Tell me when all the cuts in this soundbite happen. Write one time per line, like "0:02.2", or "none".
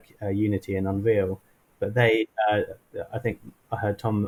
none